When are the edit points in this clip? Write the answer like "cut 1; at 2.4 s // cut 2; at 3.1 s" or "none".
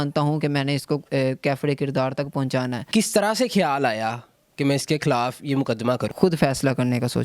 cut 1; at 2.9 s // cut 2; at 6.1 s